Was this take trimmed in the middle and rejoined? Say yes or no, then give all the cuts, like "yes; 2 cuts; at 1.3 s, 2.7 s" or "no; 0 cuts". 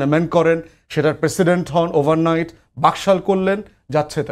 no; 0 cuts